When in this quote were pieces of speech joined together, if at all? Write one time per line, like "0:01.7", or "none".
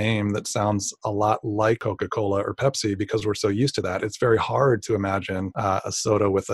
0:01.8
0:05.5